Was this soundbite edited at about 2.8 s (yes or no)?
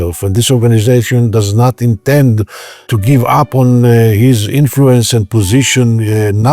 yes